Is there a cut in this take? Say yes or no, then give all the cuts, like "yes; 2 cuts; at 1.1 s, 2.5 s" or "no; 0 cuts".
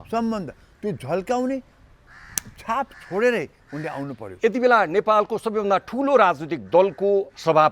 yes; 1 cut; at 4.2 s